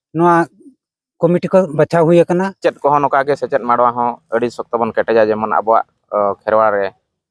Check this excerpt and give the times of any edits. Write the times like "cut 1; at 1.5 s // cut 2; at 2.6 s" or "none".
cut 1; at 2.6 s